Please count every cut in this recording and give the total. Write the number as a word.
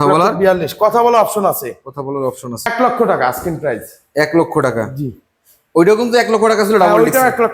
one